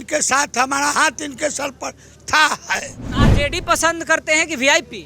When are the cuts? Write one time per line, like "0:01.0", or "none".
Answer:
0:03.0